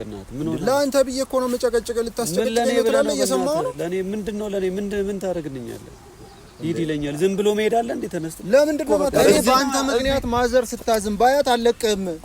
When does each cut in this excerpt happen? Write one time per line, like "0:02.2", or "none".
0:09.1